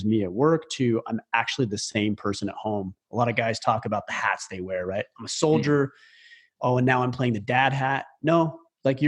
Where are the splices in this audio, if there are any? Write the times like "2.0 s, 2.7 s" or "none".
none